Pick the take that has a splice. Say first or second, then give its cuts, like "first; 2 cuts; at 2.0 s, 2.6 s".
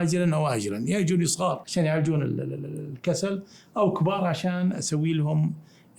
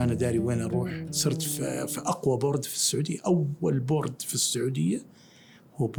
first; 1 cut; at 1.6 s